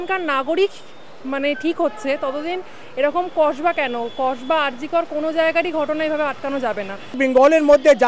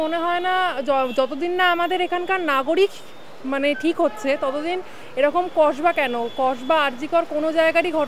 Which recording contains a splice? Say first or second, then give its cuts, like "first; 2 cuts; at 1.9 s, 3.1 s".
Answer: first; 1 cut; at 7.2 s